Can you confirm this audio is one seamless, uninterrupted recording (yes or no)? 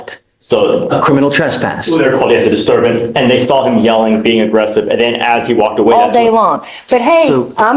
no